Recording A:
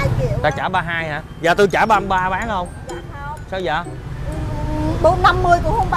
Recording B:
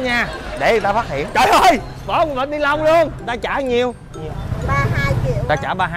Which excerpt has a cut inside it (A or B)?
B